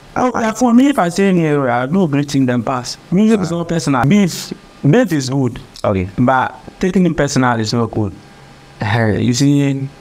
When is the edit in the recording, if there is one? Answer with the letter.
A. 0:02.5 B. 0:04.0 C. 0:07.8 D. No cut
B